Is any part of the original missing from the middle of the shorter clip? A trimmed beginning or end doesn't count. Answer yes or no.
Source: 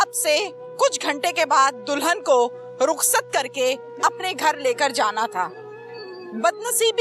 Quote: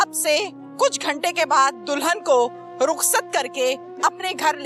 no